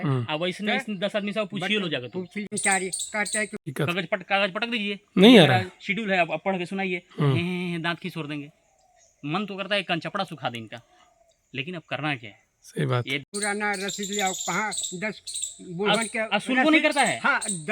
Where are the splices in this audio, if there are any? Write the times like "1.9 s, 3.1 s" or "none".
2.5 s, 3.7 s, 13.3 s